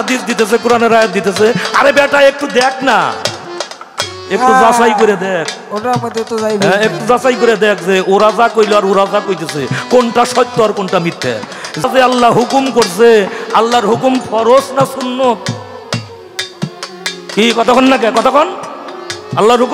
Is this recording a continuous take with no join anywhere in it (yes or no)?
no